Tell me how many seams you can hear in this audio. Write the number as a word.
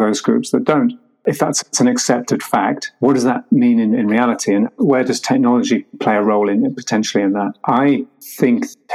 one